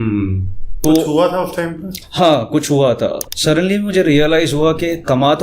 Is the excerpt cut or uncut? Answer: cut